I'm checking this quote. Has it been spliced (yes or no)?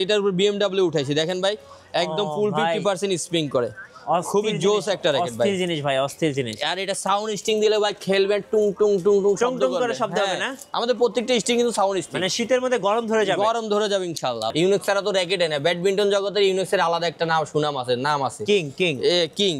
yes